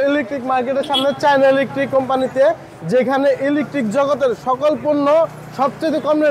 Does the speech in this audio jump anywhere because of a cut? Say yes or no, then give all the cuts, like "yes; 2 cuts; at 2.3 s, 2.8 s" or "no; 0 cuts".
no; 0 cuts